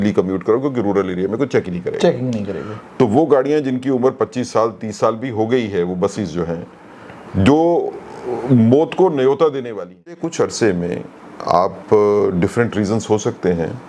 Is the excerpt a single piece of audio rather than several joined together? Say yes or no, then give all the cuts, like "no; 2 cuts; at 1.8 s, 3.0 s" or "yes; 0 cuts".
no; 1 cut; at 10.2 s